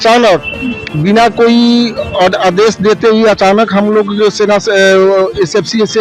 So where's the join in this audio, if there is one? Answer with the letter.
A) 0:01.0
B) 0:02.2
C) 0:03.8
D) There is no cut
D